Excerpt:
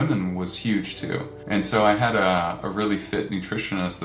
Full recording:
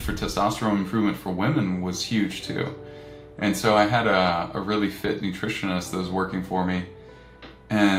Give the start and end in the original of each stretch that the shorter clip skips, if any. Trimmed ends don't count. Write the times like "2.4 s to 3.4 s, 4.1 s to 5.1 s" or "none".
2.8 s to 3.2 s